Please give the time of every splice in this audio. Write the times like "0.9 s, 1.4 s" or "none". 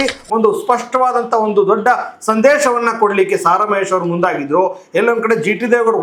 none